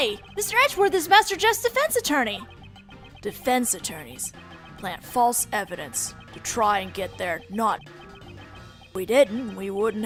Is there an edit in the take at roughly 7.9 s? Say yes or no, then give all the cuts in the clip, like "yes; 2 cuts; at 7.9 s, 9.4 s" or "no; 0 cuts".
no; 0 cuts